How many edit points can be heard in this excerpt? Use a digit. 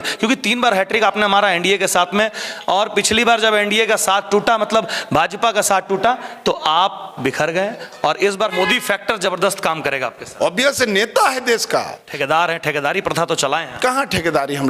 2